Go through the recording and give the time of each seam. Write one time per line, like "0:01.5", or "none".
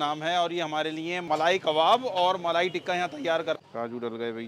0:01.2
0:03.6

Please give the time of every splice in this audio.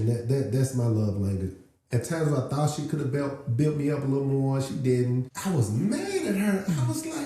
0:05.3

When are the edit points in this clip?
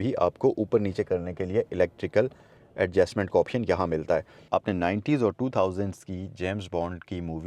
0:04.4

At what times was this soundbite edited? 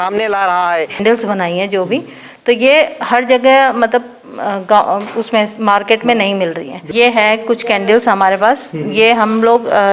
0:01.0
0:06.7

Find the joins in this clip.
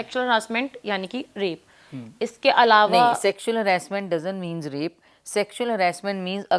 none

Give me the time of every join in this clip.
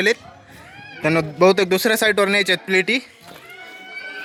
none

